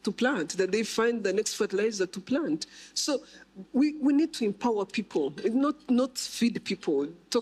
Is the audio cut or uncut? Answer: uncut